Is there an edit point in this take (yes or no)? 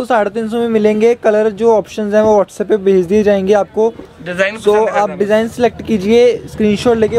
no